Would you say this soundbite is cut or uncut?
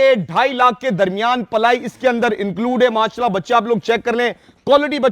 uncut